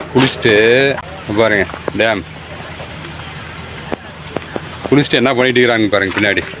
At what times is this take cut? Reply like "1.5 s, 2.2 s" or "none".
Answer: 1.1 s